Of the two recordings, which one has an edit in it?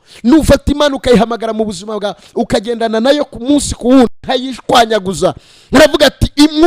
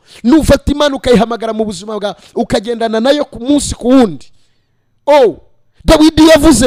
first; 1 cut; at 4.2 s

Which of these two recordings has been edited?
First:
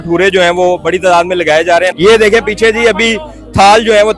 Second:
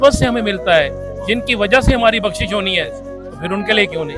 first; 1 cut; at 1.9 s

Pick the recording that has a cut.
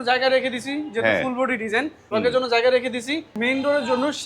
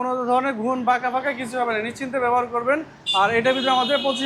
first; 2 cuts; at 2.1 s, 3.4 s

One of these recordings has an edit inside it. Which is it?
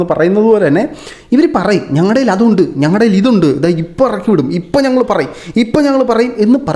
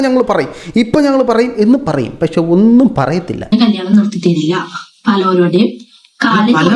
second; 1 cut; at 3.5 s

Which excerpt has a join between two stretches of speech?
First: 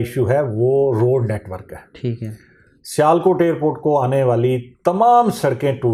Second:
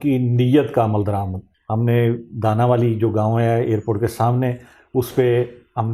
second; 1 cut; at 1.4 s

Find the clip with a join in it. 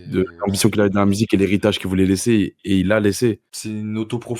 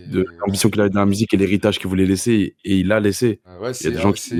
first; 1 cut; at 3.5 s

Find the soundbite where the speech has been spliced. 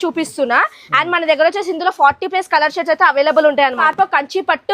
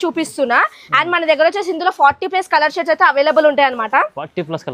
first; 1 cut; at 3.8 s

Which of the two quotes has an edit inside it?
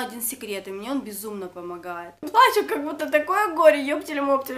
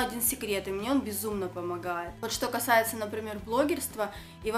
first; 1 cut; at 2.2 s

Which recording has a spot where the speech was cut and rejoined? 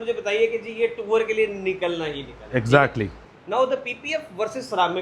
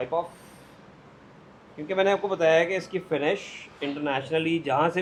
first; 1 cut; at 3.2 s

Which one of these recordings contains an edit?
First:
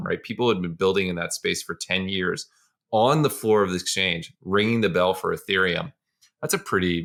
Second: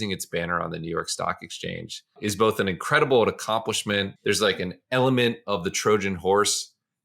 second; 2 cuts; at 2.1 s, 4.1 s

